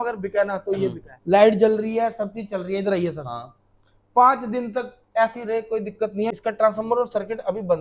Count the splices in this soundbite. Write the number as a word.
two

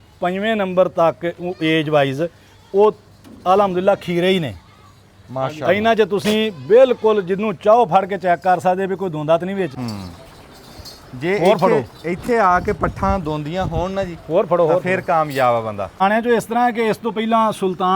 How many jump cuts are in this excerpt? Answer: two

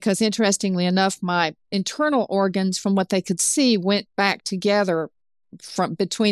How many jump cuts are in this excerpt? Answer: zero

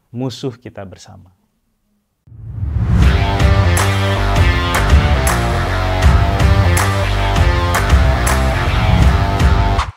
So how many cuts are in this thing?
zero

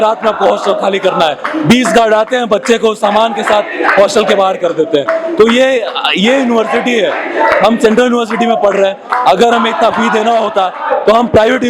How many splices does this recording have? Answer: zero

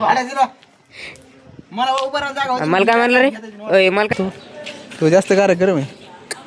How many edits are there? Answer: one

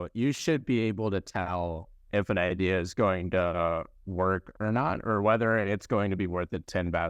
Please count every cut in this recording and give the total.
zero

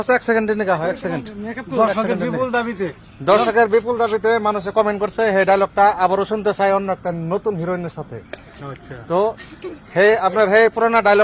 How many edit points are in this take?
zero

